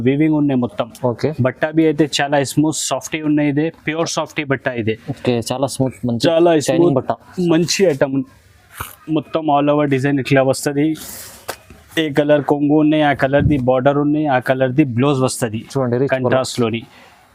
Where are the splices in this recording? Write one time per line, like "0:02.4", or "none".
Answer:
none